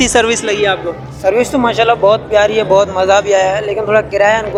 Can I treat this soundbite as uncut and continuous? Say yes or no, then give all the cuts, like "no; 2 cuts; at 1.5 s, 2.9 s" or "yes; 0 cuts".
yes; 0 cuts